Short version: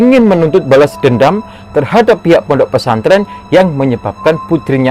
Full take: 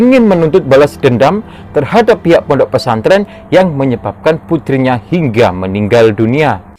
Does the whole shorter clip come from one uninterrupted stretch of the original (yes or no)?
yes